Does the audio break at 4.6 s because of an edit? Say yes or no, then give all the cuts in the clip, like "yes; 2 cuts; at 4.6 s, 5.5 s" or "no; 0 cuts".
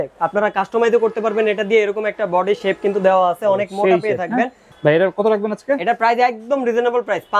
yes; 1 cut; at 4.6 s